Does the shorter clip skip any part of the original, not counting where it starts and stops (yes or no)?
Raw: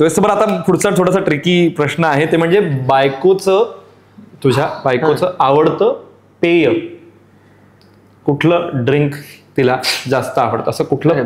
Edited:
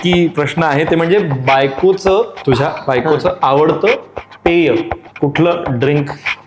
yes